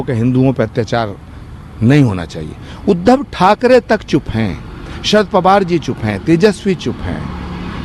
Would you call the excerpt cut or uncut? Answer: uncut